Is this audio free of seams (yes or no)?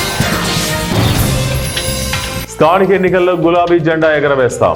yes